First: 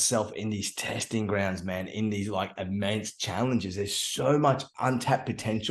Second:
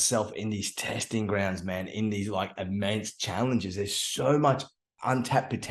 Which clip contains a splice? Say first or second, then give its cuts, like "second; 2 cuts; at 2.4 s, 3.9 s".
first; 1 cut; at 4.7 s